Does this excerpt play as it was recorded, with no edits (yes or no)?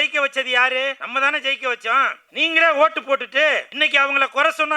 no